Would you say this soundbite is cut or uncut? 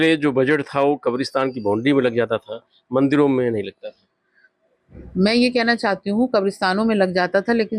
uncut